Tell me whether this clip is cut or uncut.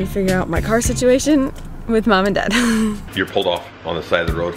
cut